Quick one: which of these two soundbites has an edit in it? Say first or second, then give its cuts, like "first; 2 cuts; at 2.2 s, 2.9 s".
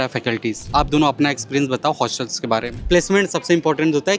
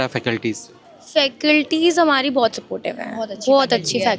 first; 2 cuts; at 0.7 s, 2.7 s